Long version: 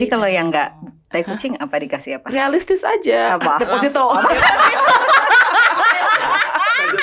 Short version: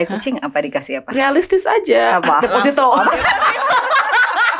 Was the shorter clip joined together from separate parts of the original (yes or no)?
no